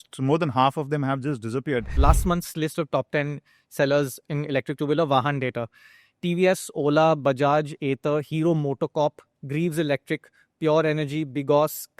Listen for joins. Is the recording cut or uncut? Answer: cut